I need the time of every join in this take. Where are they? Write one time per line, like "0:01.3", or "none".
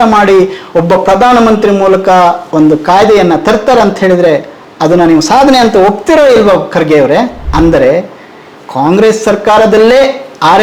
0:07.4